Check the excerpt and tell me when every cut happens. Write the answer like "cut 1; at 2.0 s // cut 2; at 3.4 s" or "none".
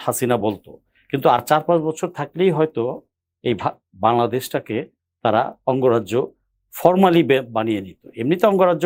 none